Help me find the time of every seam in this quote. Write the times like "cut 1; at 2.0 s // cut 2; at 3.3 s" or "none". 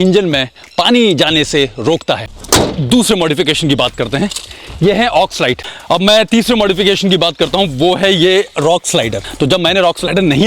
cut 1; at 2.3 s // cut 2; at 5.6 s // cut 3; at 9.2 s

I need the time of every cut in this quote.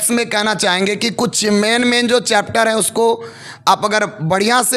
none

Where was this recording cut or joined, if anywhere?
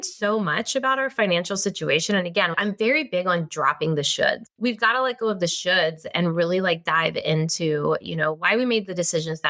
cut 1; at 4.5 s

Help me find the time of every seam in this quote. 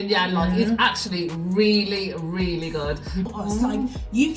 cut 1; at 3.3 s

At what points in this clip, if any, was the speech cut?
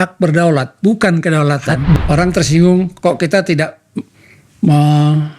cut 1; at 2.0 s

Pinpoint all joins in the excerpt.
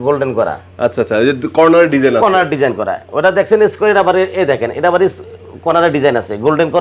none

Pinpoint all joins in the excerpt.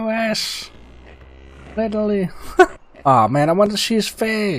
cut 1; at 2.9 s

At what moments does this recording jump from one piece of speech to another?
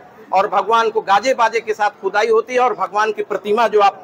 none

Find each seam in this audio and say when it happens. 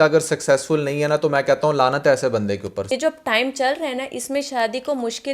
cut 1; at 2.9 s

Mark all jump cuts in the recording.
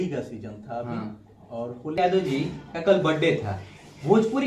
cut 1; at 2.0 s

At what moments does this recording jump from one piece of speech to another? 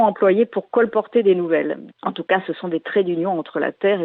cut 1; at 1.8 s

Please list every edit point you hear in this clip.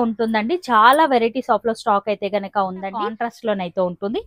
cut 1; at 3.2 s

